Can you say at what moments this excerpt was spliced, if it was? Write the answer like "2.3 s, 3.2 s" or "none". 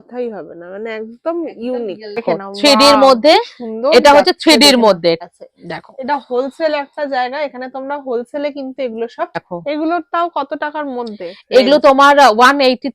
2.2 s, 5.2 s, 9.5 s